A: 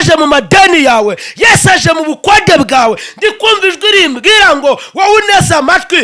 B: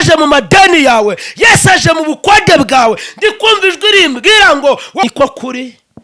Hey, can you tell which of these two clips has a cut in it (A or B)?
B